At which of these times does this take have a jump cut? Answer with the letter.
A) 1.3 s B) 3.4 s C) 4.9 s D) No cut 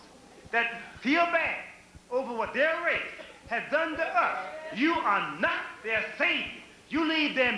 C